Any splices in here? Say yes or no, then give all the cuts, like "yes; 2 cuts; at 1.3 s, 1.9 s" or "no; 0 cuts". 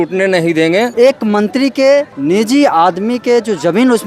yes; 2 cuts; at 0.9 s, 2.1 s